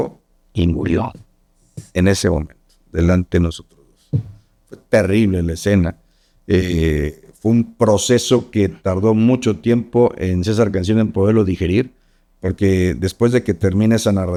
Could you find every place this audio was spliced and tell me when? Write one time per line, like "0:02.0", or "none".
none